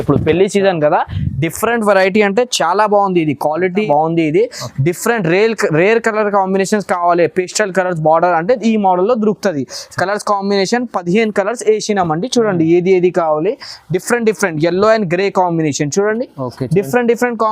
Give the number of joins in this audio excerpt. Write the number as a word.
one